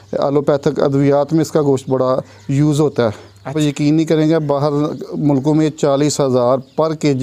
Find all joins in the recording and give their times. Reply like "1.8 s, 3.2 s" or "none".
3.5 s

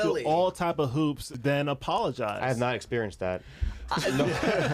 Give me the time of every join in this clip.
1.3 s

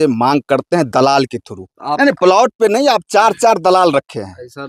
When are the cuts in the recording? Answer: 1.9 s

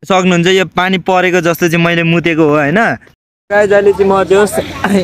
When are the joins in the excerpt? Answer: 3.1 s

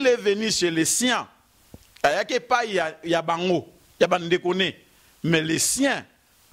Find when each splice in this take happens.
none

